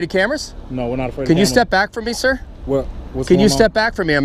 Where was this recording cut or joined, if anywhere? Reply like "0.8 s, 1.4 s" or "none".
none